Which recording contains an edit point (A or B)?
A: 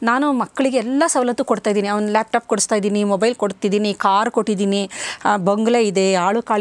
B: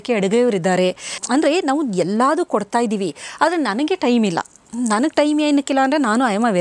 B